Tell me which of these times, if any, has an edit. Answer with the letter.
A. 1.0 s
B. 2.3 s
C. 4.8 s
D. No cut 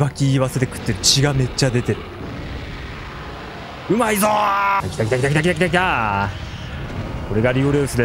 C